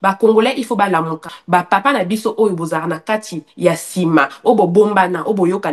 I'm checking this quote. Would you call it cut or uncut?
cut